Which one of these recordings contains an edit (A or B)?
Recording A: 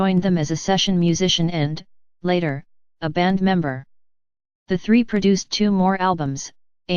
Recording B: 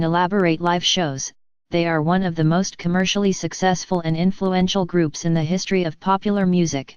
A